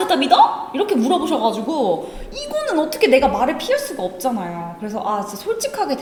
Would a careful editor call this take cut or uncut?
uncut